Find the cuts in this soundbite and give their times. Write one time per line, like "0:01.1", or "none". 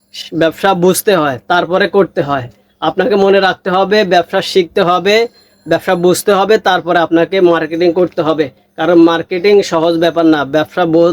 none